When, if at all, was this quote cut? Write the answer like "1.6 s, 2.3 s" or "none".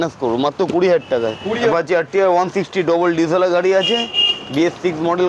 1.7 s